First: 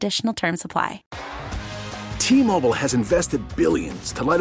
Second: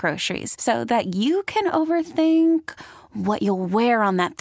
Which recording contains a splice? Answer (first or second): first